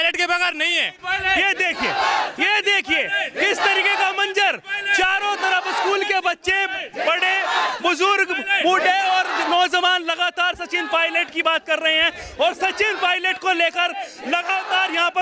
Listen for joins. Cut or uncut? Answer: cut